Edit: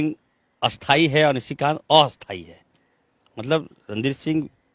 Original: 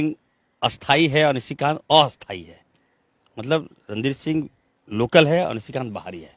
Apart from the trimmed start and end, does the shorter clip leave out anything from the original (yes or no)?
no